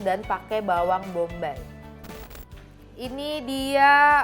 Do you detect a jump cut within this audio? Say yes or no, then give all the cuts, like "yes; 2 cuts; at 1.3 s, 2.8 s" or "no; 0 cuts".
yes; 1 cut; at 2.3 s